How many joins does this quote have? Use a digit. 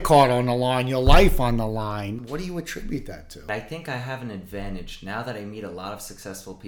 2